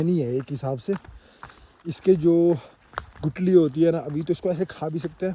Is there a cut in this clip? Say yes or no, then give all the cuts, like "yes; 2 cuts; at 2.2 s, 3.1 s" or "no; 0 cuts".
no; 0 cuts